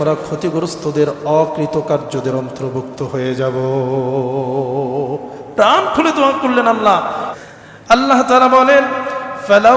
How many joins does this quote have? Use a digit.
1